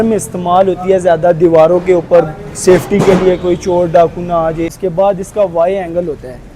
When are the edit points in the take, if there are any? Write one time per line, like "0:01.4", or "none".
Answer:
0:04.7